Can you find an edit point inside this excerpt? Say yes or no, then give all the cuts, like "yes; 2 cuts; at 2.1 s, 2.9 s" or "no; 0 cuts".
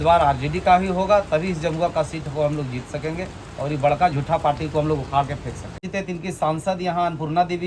yes; 1 cut; at 5.8 s